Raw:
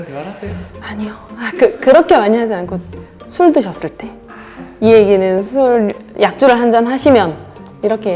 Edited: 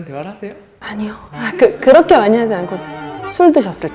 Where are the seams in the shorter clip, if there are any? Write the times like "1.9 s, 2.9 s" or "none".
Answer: none